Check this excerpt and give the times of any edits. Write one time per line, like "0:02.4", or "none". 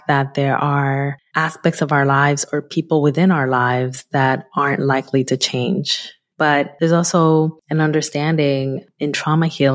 0:01.2
0:06.5
0:07.6